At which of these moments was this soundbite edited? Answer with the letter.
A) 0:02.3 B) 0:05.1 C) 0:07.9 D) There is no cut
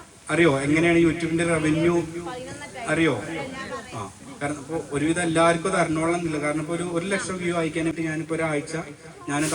C